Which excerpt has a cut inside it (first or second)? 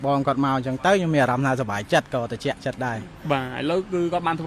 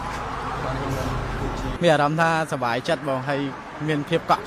second